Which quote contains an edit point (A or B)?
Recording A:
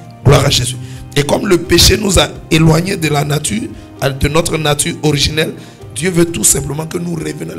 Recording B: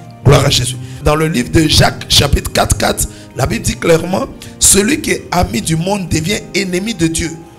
B